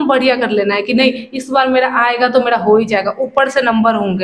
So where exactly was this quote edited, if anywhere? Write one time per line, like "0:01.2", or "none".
none